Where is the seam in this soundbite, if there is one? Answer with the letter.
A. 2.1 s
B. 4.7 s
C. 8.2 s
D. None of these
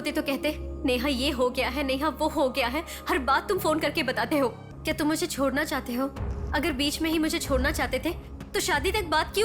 B